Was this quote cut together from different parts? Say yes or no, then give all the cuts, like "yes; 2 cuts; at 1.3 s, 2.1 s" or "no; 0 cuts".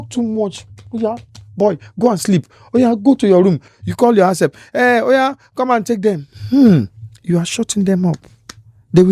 no; 0 cuts